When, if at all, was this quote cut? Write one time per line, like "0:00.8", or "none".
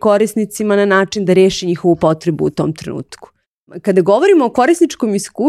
0:03.8